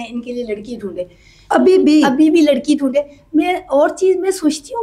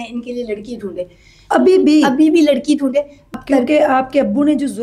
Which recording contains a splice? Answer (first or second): second